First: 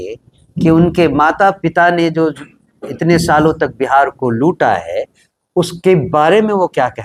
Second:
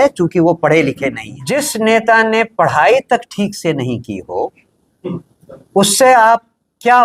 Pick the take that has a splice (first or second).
second